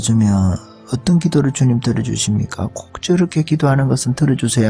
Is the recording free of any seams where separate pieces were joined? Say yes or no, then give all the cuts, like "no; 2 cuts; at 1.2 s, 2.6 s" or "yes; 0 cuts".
no; 1 cut; at 2.8 s